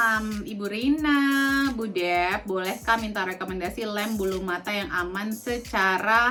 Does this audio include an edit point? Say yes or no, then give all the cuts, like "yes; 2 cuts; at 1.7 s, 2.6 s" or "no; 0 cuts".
no; 0 cuts